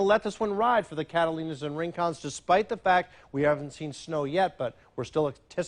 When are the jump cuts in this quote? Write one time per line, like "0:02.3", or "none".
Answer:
none